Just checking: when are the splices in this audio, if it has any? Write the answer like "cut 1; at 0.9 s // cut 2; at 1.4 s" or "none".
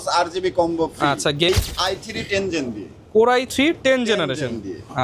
cut 1; at 1.5 s